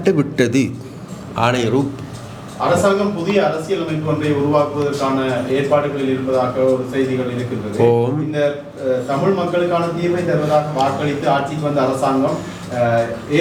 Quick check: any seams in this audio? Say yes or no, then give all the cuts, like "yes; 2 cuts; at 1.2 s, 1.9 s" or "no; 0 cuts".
no; 0 cuts